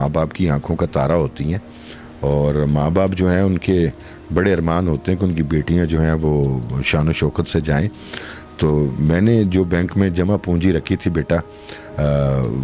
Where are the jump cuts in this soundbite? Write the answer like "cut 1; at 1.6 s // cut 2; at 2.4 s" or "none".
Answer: none